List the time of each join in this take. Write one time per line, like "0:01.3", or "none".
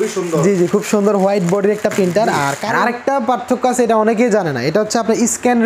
0:02.6

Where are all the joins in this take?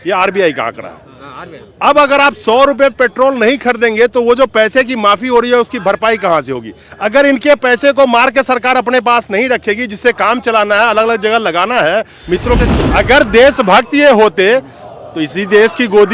0:12.6

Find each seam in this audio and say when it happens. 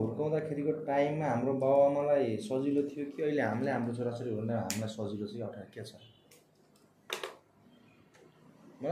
none

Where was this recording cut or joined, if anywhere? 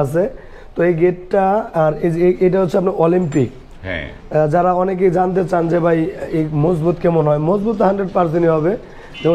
none

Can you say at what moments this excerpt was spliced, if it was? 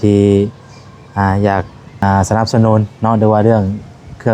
0:01.8

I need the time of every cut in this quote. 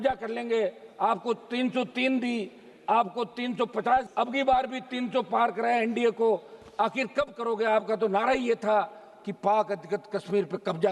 none

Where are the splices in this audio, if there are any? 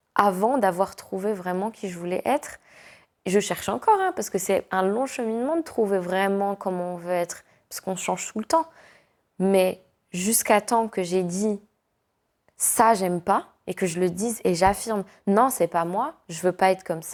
none

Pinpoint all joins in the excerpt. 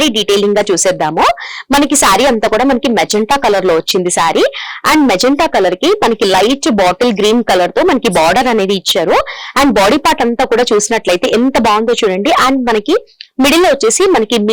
none

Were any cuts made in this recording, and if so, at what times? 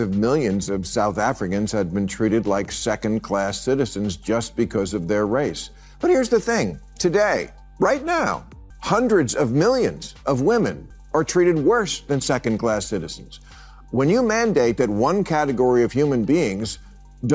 none

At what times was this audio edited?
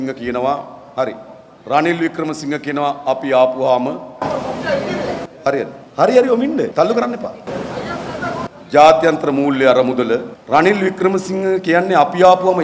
0:05.8
0:06.7
0:07.4
0:10.3

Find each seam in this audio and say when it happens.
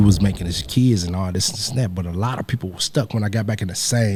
none

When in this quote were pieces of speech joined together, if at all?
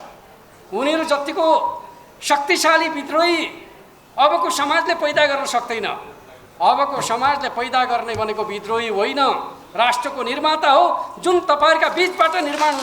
none

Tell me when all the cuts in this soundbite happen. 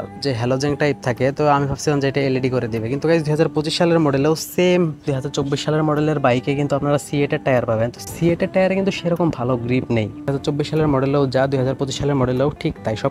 0:05.2
0:10.3

